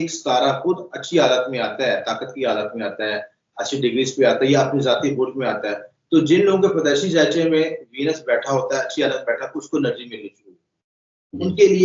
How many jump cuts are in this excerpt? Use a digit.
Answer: 0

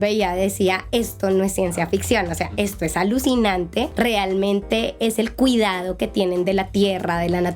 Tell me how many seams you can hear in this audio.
1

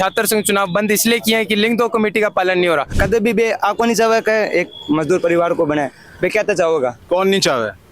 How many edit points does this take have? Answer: 1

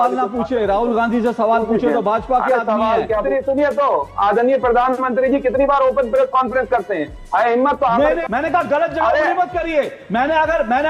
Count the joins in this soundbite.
2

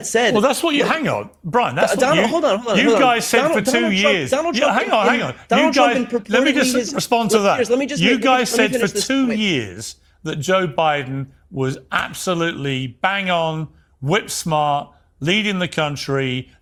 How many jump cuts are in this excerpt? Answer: 0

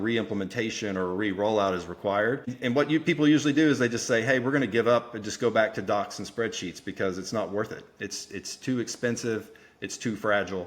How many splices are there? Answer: 1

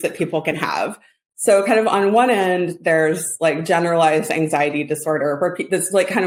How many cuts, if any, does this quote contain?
0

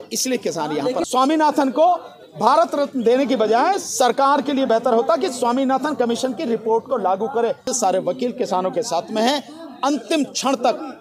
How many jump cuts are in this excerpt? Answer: 2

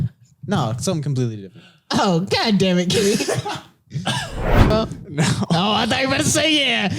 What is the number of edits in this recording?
1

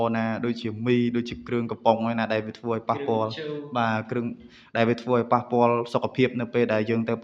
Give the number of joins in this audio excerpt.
0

